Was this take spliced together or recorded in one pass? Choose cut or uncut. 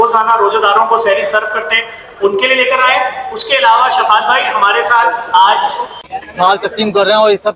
cut